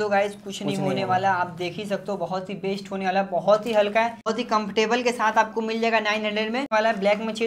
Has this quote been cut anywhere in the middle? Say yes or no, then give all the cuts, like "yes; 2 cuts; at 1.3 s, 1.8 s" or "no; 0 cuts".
yes; 2 cuts; at 4.3 s, 6.7 s